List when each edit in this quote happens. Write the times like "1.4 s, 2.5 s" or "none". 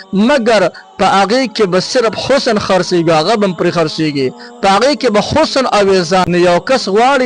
6.2 s